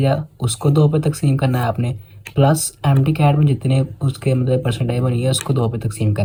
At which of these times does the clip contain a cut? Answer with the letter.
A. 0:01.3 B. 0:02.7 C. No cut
C